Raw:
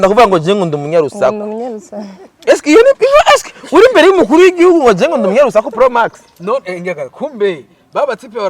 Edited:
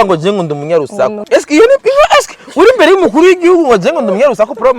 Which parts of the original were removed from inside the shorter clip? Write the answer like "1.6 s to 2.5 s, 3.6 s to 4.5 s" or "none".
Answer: 1.4 s to 2.3 s